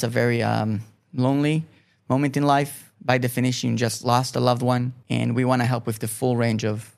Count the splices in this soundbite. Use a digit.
3